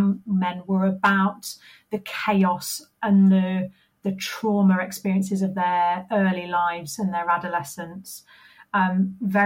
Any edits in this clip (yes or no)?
no